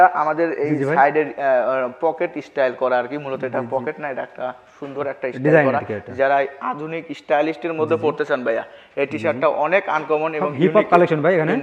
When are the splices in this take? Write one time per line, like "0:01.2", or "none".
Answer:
none